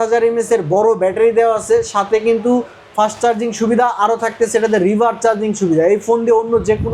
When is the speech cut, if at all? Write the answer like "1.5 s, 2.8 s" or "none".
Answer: none